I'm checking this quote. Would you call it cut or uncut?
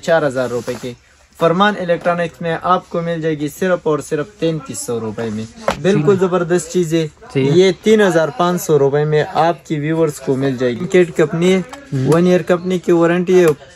cut